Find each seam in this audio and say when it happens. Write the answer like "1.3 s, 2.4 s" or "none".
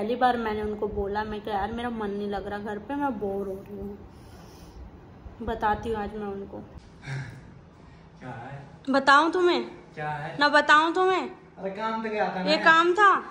6.8 s